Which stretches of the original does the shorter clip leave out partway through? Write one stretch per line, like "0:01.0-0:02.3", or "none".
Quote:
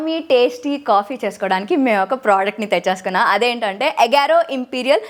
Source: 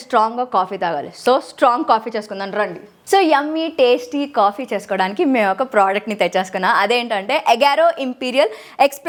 none